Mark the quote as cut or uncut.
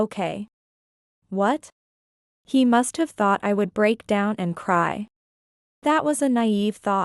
cut